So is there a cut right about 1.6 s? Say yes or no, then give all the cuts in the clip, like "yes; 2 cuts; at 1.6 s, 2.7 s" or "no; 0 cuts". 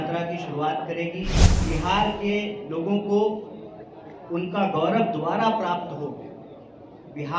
yes; 1 cut; at 1.6 s